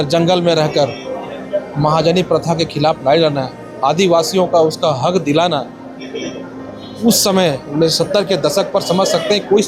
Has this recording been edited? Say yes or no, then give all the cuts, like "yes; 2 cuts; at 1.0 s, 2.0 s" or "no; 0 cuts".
no; 0 cuts